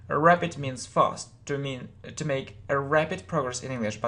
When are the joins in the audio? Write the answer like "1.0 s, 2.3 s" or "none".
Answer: 1.3 s